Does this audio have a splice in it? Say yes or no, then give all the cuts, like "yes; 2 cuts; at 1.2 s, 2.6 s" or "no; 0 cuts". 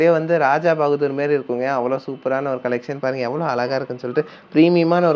no; 0 cuts